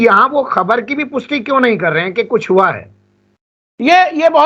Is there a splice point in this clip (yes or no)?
no